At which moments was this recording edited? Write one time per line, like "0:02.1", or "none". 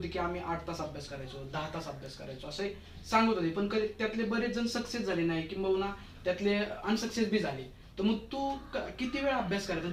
none

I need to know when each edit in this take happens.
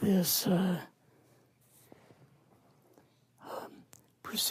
none

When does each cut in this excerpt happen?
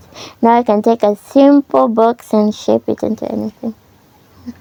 none

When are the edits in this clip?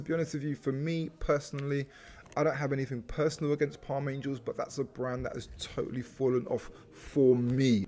none

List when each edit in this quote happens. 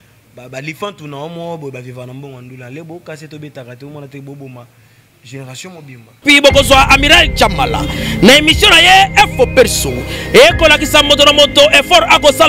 0:06.1

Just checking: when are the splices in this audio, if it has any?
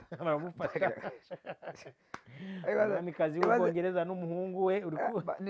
none

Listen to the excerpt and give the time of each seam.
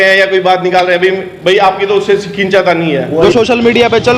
0:03.0

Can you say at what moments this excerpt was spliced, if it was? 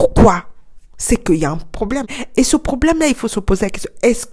0:02.2

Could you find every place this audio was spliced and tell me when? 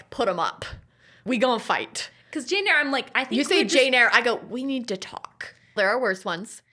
0:01.2
0:05.8

